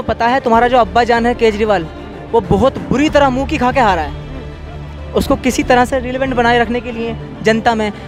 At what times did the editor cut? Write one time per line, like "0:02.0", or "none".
none